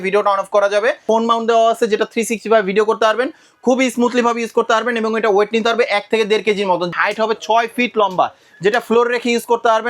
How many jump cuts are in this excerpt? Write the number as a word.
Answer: two